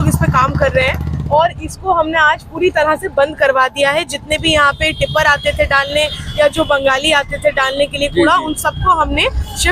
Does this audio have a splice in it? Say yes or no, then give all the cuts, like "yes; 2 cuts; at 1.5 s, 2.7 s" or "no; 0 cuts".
no; 0 cuts